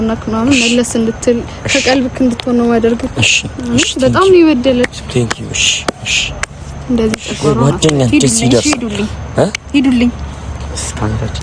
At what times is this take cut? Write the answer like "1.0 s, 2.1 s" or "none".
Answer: none